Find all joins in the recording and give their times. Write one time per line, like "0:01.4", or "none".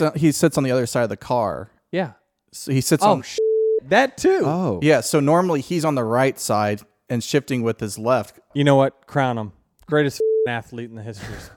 0:08.5